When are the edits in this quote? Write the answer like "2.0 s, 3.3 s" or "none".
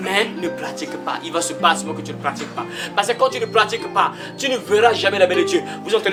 none